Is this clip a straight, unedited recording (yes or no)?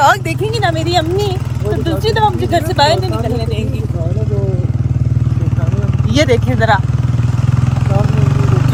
yes